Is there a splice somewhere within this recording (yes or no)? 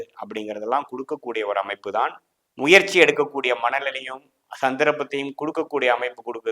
yes